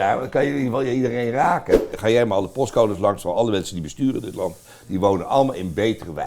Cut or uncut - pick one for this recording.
cut